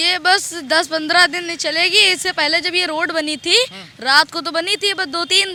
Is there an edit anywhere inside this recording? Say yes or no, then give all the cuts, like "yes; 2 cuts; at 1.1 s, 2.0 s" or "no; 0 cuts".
no; 0 cuts